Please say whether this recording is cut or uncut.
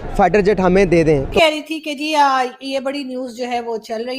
cut